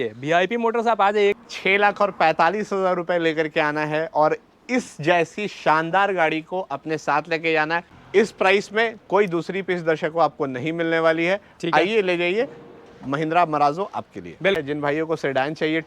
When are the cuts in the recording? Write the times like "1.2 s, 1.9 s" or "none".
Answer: 1.3 s, 8.0 s, 14.6 s